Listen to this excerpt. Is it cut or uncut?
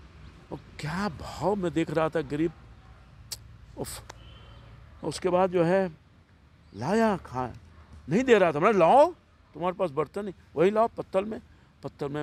uncut